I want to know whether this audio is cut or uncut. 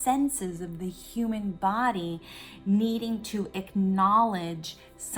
uncut